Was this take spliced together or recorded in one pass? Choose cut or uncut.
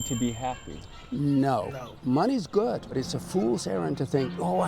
cut